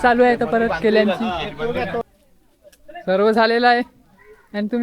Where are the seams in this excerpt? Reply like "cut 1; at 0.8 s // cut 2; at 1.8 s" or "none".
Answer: cut 1; at 2.0 s